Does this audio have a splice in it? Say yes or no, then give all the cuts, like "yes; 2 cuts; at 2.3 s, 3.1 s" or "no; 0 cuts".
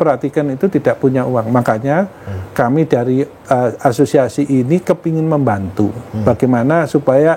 no; 0 cuts